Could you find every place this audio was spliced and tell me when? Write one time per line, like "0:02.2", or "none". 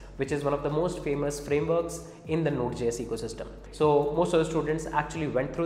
0:03.6